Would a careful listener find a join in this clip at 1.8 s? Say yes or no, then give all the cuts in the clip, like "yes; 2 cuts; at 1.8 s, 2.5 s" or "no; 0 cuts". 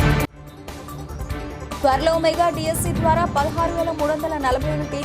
yes; 1 cut; at 1.8 s